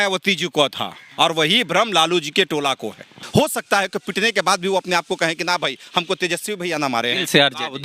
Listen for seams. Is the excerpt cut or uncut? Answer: cut